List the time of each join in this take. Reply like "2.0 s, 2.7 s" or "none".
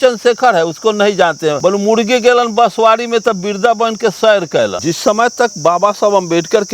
1.6 s, 4.8 s